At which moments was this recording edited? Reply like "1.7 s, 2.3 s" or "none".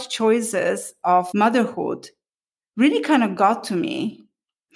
0.9 s